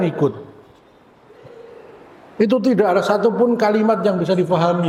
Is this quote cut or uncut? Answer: uncut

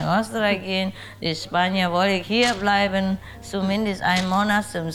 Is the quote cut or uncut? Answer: uncut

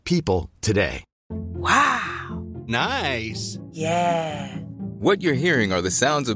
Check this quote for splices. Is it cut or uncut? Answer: cut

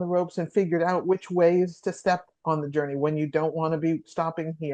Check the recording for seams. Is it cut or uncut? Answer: uncut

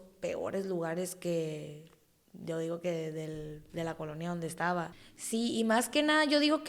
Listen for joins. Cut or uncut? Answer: cut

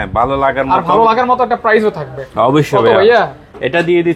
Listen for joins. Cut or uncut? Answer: uncut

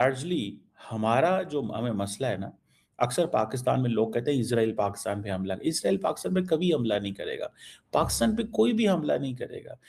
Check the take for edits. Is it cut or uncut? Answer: uncut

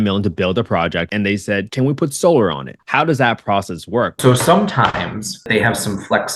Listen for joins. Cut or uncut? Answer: cut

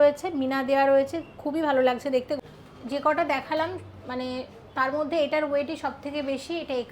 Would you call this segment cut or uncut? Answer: cut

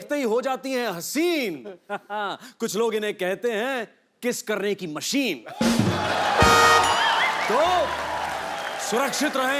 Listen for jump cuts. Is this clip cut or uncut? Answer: uncut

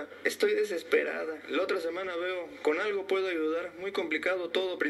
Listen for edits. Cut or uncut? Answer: uncut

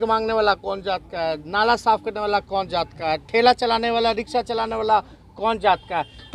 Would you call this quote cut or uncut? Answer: uncut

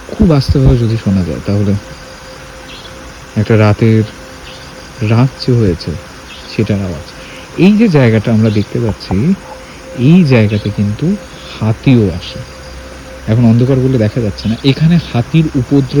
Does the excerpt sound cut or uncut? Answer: uncut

